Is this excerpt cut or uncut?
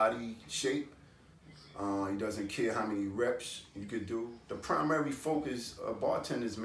cut